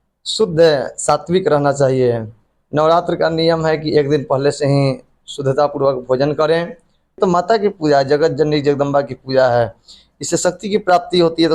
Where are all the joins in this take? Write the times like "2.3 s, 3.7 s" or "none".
7.2 s